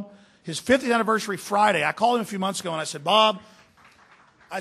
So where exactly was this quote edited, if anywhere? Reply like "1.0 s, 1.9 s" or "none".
none